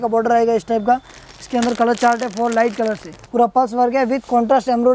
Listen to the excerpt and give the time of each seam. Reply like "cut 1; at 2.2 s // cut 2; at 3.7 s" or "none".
cut 1; at 3.1 s

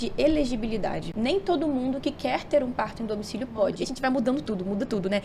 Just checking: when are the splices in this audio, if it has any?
cut 1; at 1.1 s // cut 2; at 3.9 s

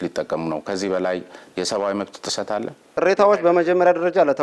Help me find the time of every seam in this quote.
cut 1; at 2.9 s

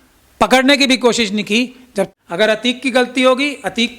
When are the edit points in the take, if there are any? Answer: cut 1; at 2.1 s

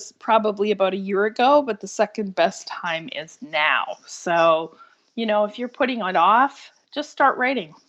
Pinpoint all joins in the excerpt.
none

